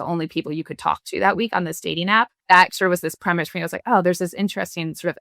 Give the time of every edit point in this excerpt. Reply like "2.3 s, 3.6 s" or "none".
2.4 s